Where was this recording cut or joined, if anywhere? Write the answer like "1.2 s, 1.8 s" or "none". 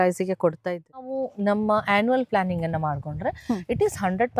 1.1 s